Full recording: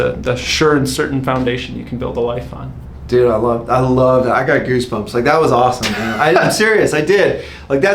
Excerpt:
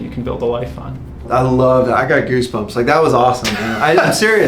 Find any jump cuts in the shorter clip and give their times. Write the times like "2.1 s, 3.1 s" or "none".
1.2 s